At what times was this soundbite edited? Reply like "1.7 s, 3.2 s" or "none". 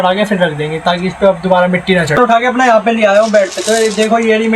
2.2 s